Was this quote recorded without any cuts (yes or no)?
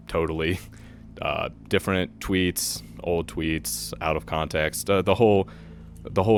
yes